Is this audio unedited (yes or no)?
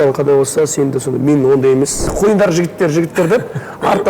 no